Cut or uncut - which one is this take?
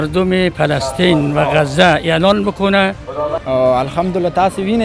cut